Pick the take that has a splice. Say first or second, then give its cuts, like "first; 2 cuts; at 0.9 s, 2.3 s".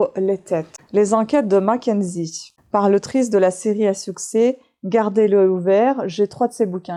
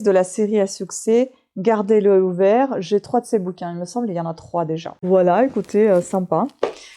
second; 1 cut; at 4.9 s